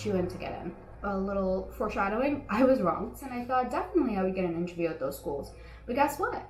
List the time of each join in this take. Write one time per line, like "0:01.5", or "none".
0:00.9
0:03.2